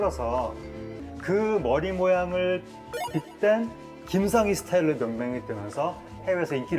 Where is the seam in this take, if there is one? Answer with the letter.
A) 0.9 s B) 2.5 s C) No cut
A